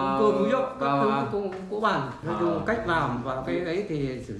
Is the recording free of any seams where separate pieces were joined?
no; 1 cut; at 2.2 s

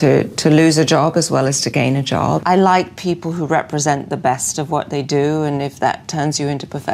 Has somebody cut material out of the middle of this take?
yes; 1 cut; at 2.4 s

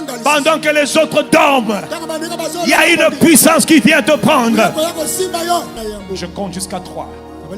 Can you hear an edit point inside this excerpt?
yes; 1 cut; at 5.7 s

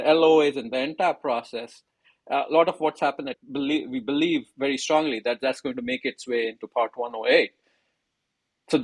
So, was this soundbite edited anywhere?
no; 0 cuts

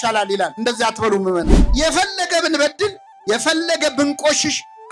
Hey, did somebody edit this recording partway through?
no; 0 cuts

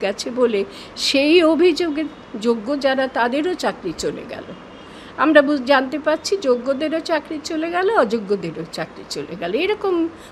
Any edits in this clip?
no; 0 cuts

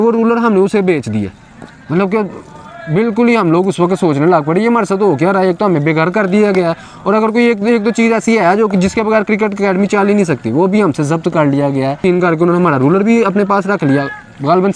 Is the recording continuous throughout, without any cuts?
no; 1 cut; at 12.0 s

